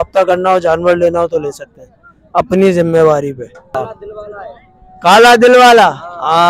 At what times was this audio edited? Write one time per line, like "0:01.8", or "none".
0:03.7